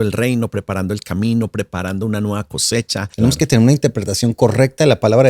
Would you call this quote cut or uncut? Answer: cut